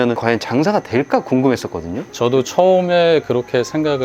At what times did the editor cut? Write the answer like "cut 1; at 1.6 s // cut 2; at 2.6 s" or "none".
none